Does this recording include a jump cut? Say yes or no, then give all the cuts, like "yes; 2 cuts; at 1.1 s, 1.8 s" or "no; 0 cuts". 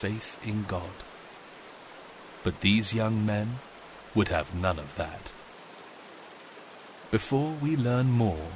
yes; 4 cuts; at 0.9 s, 2.4 s, 5.2 s, 7.1 s